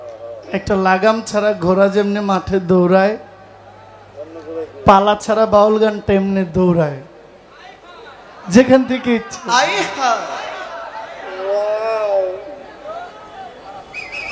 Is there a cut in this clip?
no; 0 cuts

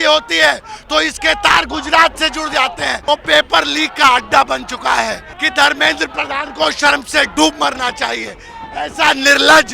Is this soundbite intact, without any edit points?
no; 2 cuts; at 3.0 s, 5.3 s

